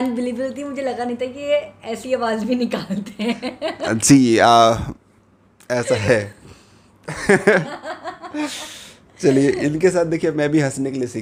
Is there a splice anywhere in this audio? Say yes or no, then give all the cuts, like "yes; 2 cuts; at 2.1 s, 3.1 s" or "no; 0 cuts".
no; 0 cuts